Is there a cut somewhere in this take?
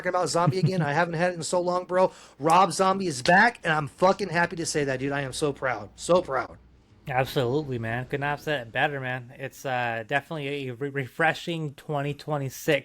no; 0 cuts

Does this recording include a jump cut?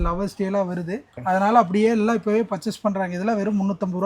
yes; 1 cut; at 1.2 s

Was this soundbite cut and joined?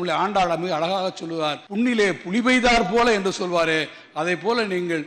yes; 1 cut; at 1.6 s

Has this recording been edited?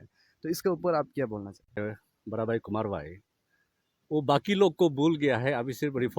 yes; 1 cut; at 1.8 s

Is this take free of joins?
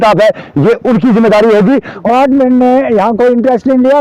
no; 1 cut; at 2.0 s

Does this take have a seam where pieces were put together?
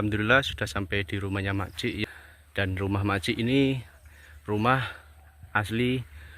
yes; 1 cut; at 2.0 s

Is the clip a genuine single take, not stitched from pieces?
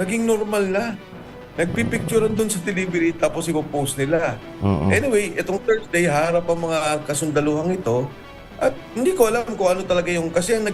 yes; 0 cuts

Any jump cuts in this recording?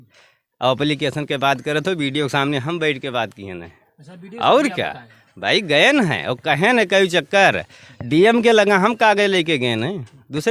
no; 0 cuts

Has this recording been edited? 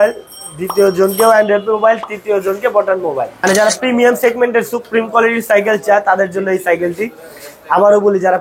yes; 1 cut; at 3.4 s

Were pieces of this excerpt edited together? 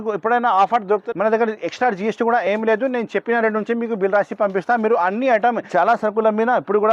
yes; 2 cuts; at 1.1 s, 5.7 s

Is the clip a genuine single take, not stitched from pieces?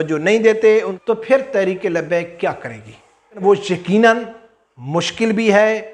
no; 2 cuts; at 0.9 s, 3.4 s

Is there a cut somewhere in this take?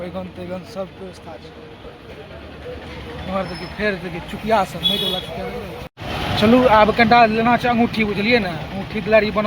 yes; 1 cut; at 5.9 s

